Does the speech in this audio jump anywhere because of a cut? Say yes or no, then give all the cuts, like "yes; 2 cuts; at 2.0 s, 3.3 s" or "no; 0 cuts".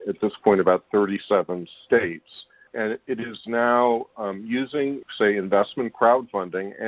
yes; 2 cuts; at 2.7 s, 5.0 s